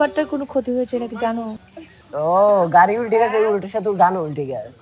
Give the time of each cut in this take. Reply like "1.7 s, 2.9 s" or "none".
1.6 s